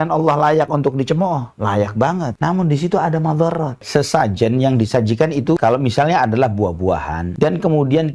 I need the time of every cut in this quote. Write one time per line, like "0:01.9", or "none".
0:02.3
0:03.8
0:05.6
0:07.3